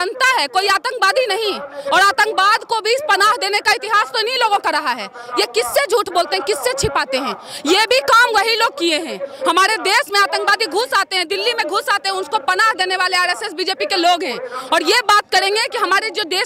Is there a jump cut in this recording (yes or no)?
no